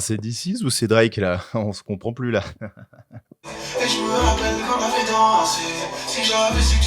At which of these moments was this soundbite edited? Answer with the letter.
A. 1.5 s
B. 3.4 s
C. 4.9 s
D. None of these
B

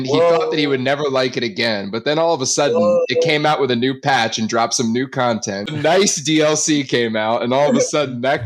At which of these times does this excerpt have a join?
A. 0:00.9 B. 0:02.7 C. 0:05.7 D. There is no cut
C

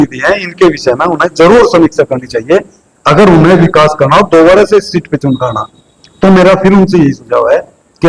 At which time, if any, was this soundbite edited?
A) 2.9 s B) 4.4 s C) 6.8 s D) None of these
D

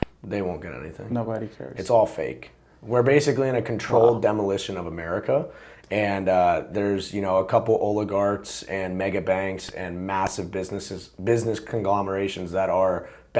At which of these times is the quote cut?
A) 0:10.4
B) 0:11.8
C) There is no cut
C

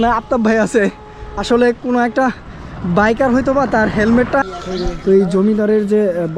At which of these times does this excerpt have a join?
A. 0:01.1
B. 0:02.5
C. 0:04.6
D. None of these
C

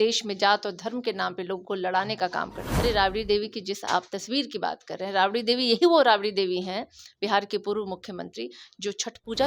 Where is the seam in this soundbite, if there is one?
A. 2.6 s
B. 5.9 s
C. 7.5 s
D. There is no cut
A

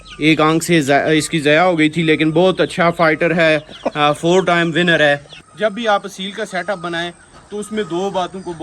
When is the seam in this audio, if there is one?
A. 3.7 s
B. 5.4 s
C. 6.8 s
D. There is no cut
B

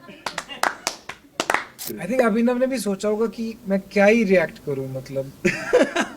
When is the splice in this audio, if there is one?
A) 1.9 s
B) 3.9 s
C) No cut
A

